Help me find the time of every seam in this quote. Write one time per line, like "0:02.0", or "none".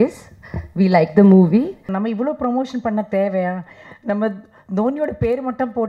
0:01.9